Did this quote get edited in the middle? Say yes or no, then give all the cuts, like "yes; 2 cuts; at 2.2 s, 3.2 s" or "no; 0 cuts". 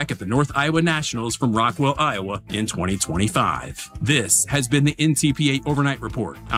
no; 0 cuts